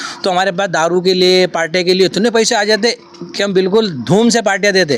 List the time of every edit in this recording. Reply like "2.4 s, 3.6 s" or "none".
none